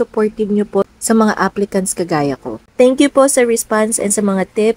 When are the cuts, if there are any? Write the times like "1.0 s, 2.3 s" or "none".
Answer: 2.7 s